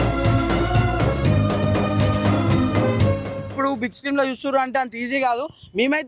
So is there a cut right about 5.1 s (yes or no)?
no